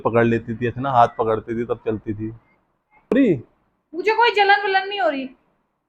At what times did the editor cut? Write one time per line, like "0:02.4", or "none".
0:03.1